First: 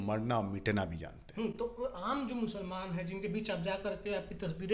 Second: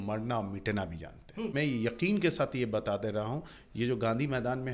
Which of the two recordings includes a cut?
second; 1 cut; at 1.5 s

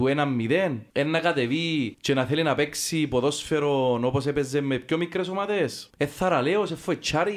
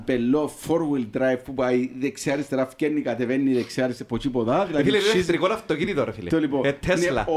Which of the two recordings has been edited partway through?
first; 3 cuts; at 0.8 s, 2.0 s, 5.8 s

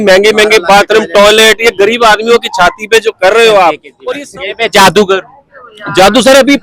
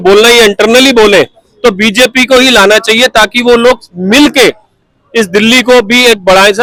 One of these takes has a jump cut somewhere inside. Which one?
first; 1 cut; at 3.9 s

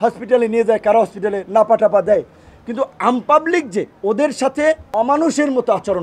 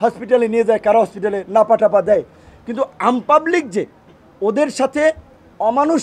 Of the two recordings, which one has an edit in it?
first; 2 cuts; at 3.9 s, 4.8 s

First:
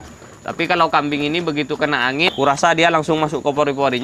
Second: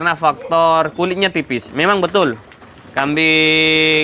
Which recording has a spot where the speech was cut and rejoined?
first; 1 cut; at 2.3 s

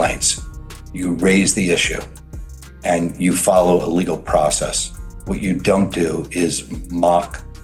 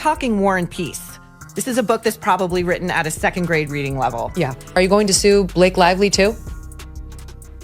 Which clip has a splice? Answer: second; 1 cut; at 4.6 s

